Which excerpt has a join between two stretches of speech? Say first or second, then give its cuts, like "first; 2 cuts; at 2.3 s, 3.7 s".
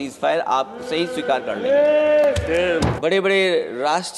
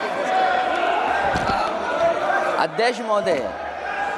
first; 1 cut; at 2.9 s